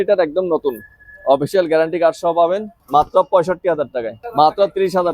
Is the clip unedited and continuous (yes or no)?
no